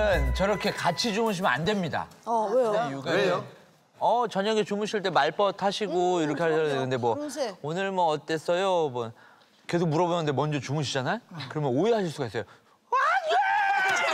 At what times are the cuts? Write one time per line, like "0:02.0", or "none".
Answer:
none